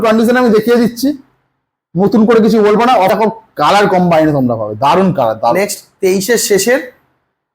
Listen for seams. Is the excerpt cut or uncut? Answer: cut